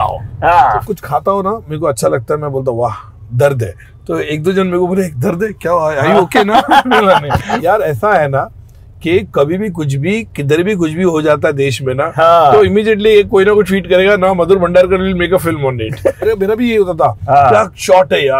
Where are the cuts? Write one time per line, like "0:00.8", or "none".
0:00.9
0:07.6
0:16.3